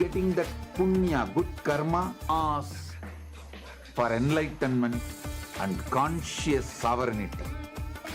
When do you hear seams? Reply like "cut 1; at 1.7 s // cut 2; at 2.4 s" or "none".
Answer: cut 1; at 2.3 s